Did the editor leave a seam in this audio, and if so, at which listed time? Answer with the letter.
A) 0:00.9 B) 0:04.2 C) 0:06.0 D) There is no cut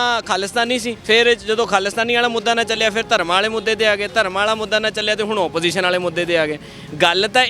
A